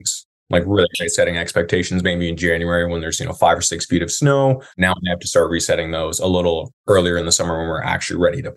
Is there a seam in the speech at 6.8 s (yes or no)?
no